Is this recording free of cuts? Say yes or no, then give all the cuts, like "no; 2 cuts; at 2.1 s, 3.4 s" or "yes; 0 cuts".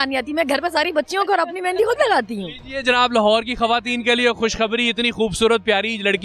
yes; 0 cuts